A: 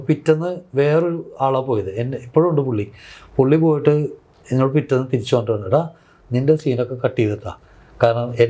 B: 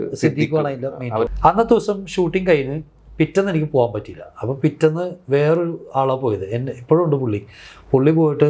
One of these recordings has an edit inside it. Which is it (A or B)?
B